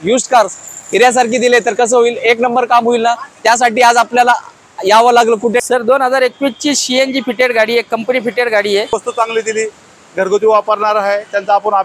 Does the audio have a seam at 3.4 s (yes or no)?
no